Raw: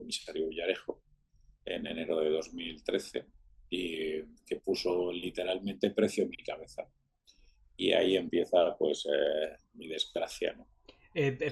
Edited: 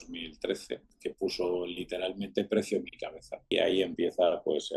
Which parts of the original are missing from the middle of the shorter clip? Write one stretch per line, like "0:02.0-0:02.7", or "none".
0:03.3-0:04.4
0:06.9-0:07.8